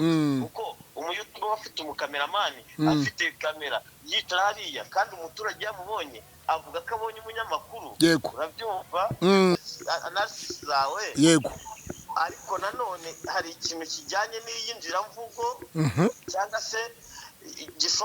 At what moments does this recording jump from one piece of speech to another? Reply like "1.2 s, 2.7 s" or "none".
9.6 s